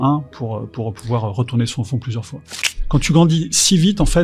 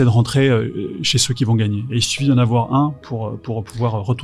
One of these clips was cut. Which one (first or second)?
first